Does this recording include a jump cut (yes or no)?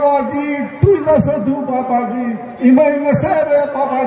no